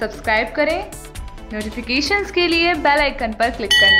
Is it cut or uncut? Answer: uncut